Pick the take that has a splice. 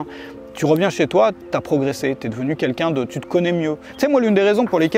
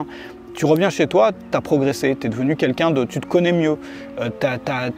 first; 1 cut; at 3.9 s

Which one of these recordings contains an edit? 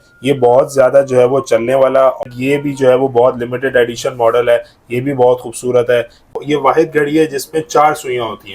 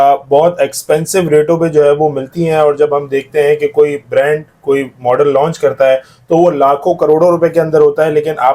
first; 2 cuts; at 2.2 s, 6.4 s

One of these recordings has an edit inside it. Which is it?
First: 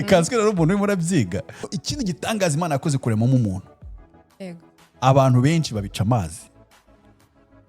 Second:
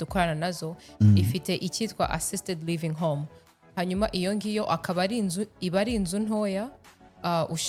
first; 1 cut; at 1.7 s

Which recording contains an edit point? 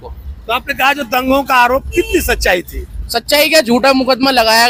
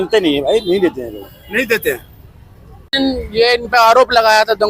second; 1 cut; at 2.8 s

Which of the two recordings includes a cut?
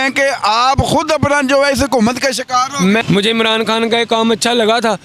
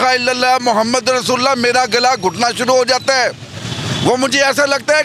first; 1 cut; at 3.0 s

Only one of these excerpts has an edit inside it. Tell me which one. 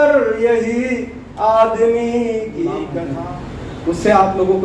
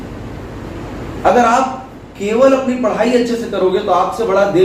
first; 1 cut; at 3.1 s

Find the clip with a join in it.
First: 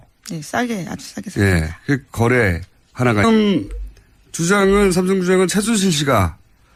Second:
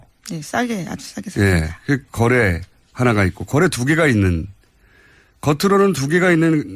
second; 1 cut; at 3.2 s

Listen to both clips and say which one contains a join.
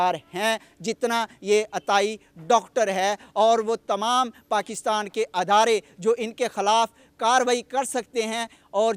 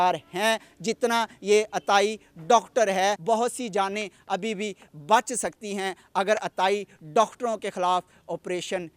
second; 1 cut; at 3.2 s

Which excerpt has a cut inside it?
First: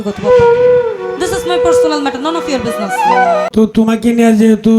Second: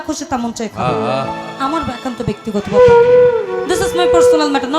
first; 1 cut; at 3.5 s

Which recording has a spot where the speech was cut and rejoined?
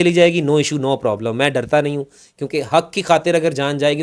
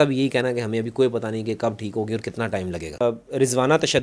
second; 1 cut; at 3.0 s

